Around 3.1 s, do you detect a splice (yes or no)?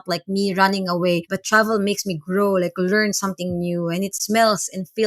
no